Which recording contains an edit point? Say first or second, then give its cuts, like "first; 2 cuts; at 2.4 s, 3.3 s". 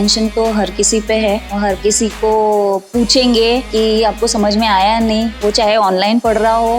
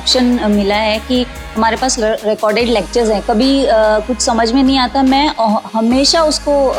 first; 2 cuts; at 1.5 s, 3.7 s